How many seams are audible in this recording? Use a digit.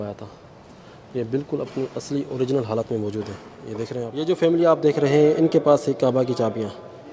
1